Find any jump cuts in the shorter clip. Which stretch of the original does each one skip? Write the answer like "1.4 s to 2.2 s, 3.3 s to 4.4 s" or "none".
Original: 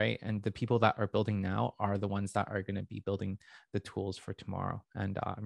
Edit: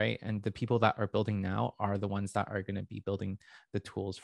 none